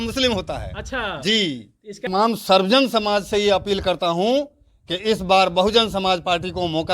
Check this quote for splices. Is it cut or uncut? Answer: cut